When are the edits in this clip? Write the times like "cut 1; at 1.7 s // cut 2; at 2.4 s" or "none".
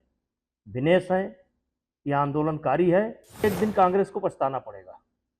cut 1; at 3.4 s